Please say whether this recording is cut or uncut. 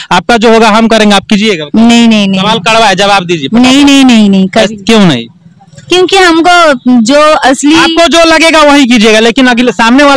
uncut